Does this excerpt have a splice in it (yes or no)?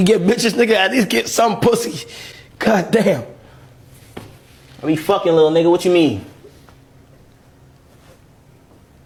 no